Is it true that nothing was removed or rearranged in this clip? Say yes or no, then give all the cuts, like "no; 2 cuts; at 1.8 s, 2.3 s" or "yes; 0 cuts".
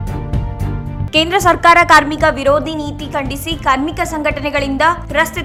yes; 0 cuts